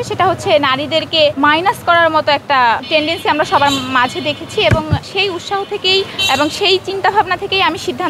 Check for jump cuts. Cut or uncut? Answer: cut